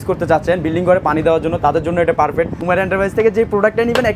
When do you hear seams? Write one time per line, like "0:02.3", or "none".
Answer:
0:02.6